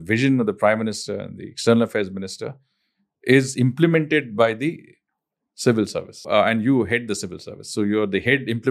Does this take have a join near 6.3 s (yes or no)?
yes